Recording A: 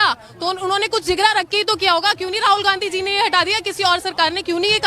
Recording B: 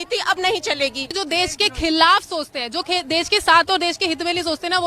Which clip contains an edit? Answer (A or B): B